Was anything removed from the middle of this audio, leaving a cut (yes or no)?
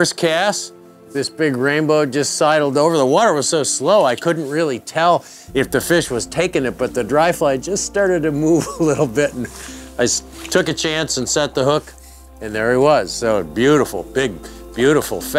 no